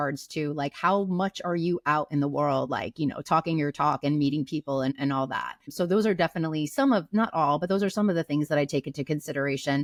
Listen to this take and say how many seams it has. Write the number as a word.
zero